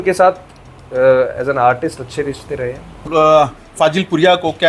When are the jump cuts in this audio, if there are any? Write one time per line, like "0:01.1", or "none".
0:03.0